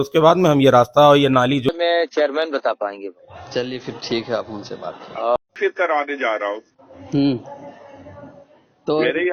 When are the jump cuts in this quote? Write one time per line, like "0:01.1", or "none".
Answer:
0:01.7
0:05.5